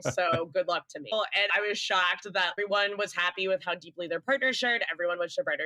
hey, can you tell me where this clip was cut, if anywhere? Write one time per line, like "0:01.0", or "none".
0:01.1
0:02.6

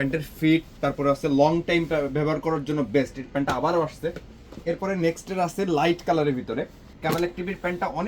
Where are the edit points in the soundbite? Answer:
0:06.8

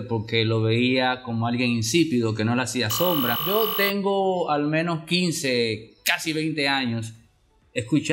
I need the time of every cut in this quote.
0:03.4

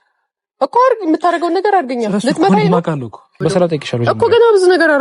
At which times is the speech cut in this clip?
0:03.4

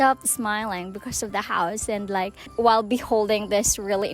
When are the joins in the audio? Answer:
0:02.4

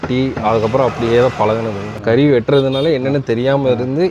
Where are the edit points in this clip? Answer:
0:02.0

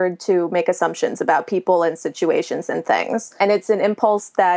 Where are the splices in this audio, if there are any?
0:03.4

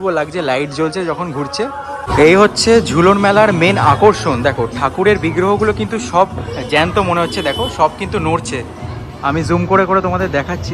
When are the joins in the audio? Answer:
0:02.0

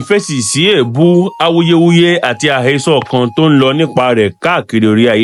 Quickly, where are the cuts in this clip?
none

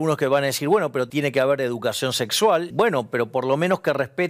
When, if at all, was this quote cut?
0:01.1
0:02.7

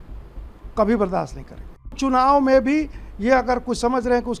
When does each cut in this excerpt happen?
0:02.0

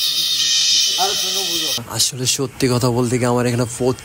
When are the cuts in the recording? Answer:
0:02.0

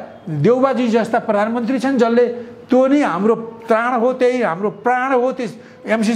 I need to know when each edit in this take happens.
none

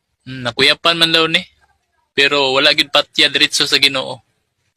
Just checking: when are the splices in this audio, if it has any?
0:00.9

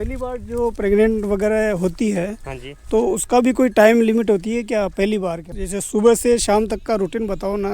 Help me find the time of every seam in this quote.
0:05.5

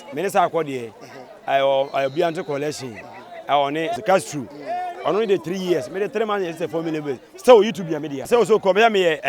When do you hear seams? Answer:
0:04.0
0:08.3

